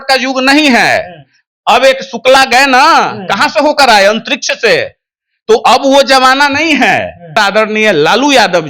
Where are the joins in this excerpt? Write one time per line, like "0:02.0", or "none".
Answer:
0:07.4